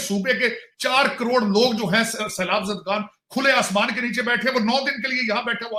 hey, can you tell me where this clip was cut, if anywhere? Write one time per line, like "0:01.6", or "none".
none